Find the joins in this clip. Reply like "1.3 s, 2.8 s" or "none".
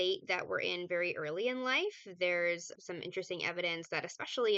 2.7 s

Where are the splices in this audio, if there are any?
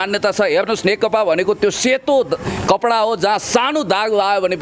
none

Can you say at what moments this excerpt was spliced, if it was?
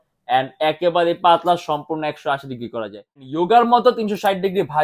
3.3 s

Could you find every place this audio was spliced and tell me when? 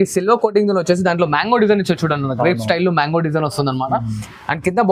none

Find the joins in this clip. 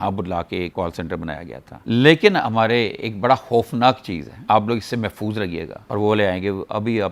1.6 s, 5.8 s

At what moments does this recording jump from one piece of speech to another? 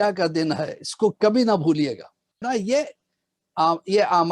2.4 s

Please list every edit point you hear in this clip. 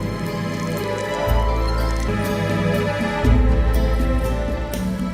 2.1 s

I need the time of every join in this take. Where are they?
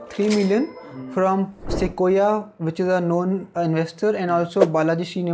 none

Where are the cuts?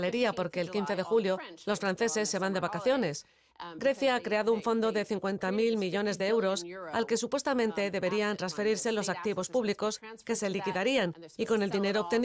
none

